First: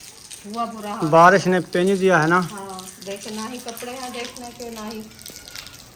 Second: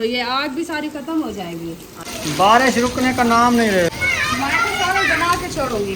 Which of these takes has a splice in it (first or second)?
second